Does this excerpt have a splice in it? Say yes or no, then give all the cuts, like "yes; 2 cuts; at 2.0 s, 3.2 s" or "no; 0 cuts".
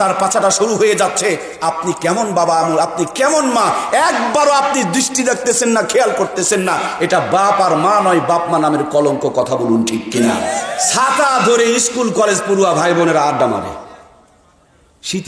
yes; 1 cut; at 10.7 s